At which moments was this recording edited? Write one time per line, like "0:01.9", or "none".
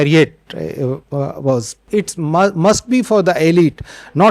0:01.8